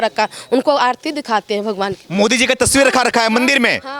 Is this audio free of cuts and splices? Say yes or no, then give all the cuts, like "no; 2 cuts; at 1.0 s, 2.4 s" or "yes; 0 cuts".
yes; 0 cuts